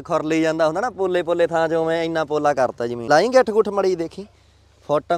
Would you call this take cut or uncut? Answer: cut